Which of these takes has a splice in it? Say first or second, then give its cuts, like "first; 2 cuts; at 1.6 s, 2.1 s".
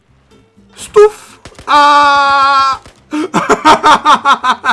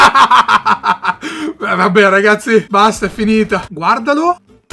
second; 1 cut; at 3.7 s